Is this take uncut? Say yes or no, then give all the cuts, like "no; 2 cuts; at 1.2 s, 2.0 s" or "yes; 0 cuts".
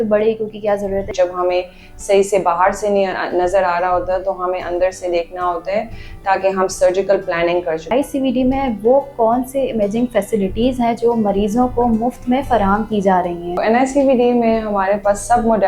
no; 3 cuts; at 1.1 s, 7.9 s, 13.6 s